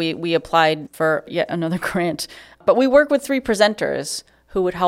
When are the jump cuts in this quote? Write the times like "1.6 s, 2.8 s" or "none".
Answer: 1.1 s, 2.6 s